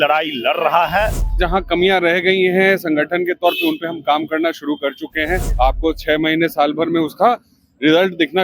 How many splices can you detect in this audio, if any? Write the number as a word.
two